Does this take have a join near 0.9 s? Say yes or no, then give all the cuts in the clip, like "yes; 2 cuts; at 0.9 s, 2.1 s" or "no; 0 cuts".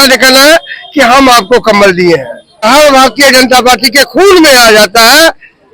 no; 1 cut; at 2.6 s